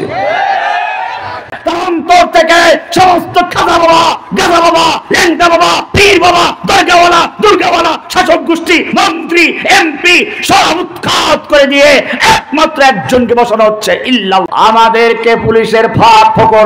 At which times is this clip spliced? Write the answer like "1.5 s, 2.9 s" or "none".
1.6 s, 14.5 s